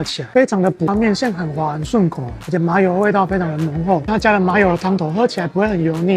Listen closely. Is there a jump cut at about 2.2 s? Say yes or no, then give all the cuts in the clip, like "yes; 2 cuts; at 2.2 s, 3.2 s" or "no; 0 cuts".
no; 2 cuts; at 0.9 s, 4.1 s